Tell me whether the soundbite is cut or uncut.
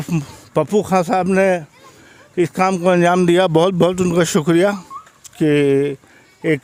uncut